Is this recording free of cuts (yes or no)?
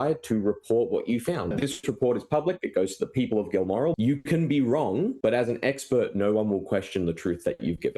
no